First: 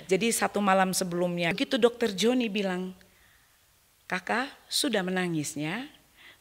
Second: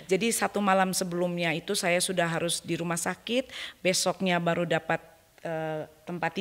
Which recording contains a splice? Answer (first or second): first